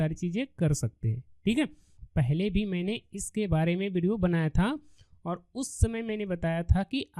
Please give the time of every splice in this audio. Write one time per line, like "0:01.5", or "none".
0:02.0